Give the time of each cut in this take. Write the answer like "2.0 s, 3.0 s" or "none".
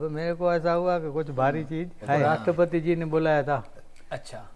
2.2 s